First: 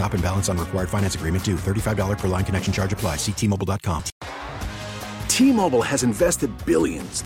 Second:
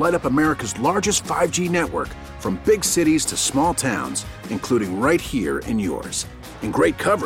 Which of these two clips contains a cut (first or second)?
first